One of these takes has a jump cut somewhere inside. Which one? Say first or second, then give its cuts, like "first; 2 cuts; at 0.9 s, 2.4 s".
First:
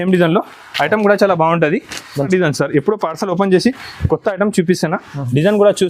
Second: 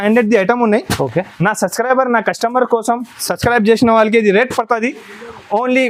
first; 1 cut; at 2.3 s